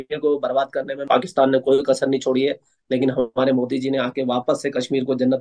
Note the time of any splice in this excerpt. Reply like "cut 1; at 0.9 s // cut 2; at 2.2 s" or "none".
cut 1; at 1.1 s